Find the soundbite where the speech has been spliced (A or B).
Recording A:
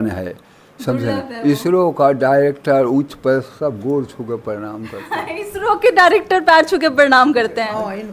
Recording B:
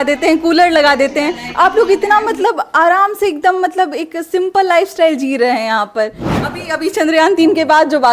B